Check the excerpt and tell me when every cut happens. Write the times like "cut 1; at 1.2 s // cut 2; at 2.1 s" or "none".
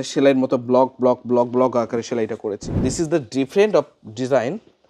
cut 1; at 2.7 s